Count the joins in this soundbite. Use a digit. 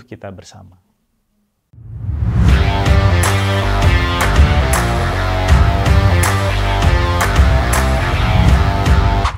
0